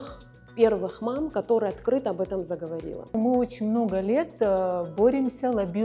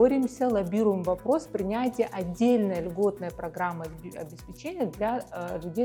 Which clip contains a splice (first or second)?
first